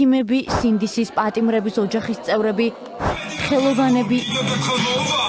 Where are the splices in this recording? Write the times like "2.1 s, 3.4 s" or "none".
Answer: none